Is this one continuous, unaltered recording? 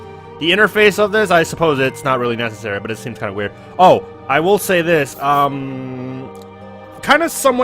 no; 1 cut; at 5.1 s

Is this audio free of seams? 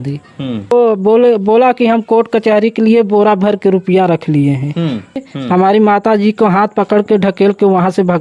no; 2 cuts; at 0.7 s, 5.3 s

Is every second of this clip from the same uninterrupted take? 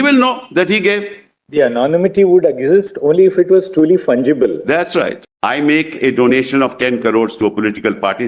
no; 1 cut; at 5.2 s

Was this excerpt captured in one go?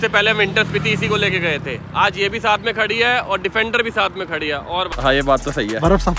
no; 1 cut; at 4.9 s

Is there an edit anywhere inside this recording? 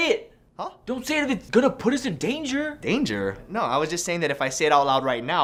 no; 0 cuts

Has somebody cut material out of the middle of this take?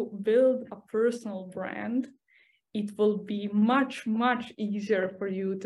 no; 0 cuts

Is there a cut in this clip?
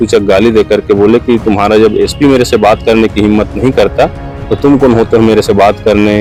no; 0 cuts

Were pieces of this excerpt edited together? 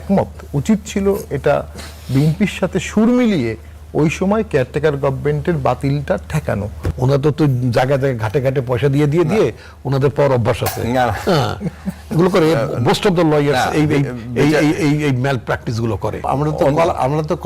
yes; 2 cuts; at 6.8 s, 16.2 s

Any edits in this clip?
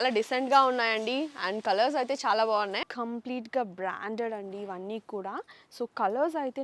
yes; 1 cut; at 2.8 s

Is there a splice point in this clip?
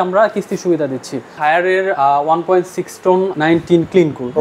yes; 2 cuts; at 1.4 s, 3.3 s

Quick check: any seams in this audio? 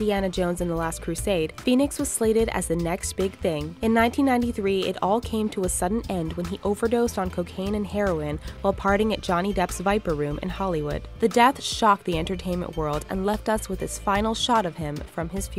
no; 0 cuts

